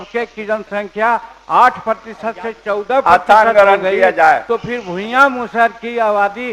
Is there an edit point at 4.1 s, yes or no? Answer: no